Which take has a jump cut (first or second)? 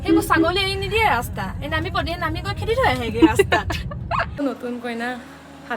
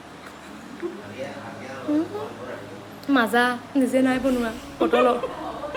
first